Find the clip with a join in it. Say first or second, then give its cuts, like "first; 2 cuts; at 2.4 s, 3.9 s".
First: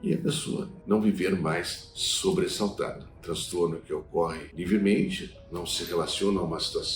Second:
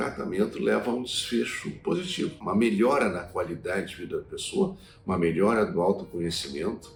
first; 2 cuts; at 3.1 s, 4.5 s